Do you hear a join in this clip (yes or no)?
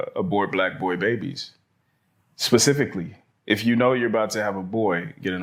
no